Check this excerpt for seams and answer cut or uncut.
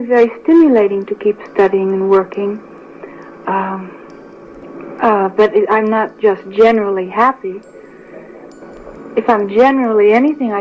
uncut